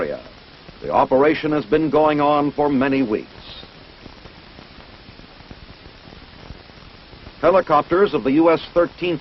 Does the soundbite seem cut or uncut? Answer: cut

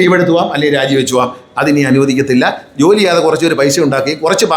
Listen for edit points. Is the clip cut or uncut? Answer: uncut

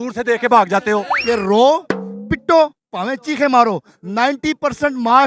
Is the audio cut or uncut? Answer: cut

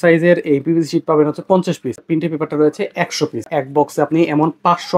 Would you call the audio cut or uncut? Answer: cut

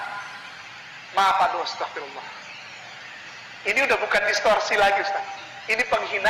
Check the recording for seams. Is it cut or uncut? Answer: uncut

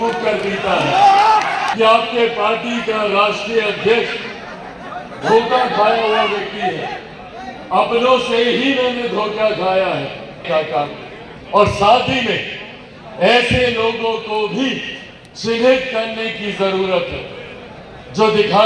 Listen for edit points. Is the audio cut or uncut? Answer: cut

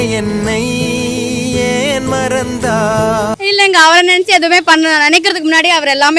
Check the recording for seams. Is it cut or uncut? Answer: cut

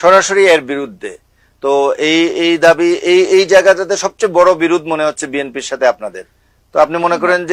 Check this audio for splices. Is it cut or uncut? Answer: uncut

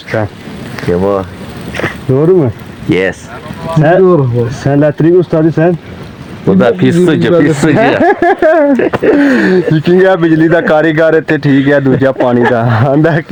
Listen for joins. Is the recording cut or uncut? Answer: uncut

